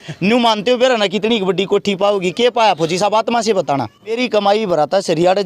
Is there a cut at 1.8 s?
no; 1 cut; at 4.2 s

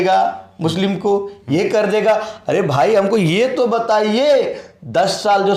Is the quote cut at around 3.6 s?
no; 0 cuts

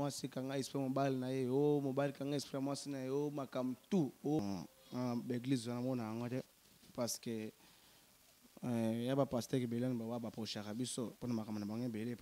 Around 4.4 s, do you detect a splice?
yes; 1 cut; at 4.4 s

